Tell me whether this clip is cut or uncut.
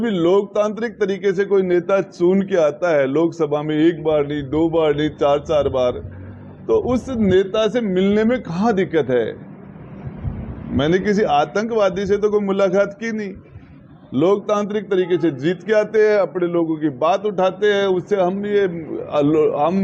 uncut